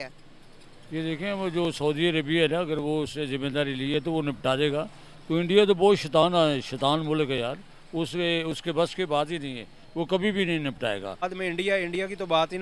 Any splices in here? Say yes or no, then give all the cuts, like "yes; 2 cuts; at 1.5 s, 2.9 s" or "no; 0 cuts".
yes; 1 cut; at 11.2 s